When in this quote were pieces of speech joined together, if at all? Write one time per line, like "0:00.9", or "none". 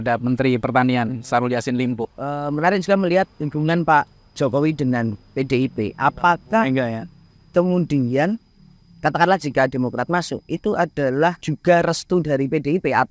0:02.0
0:11.5